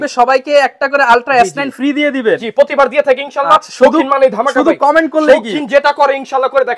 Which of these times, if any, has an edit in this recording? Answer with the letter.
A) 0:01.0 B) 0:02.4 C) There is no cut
C